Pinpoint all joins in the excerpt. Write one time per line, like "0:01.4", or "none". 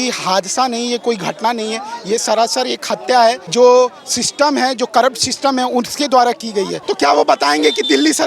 0:03.4
0:06.8